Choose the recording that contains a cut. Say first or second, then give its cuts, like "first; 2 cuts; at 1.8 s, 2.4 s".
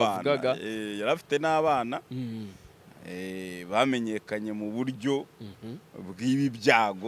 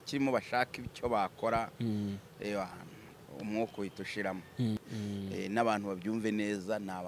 second; 1 cut; at 4.8 s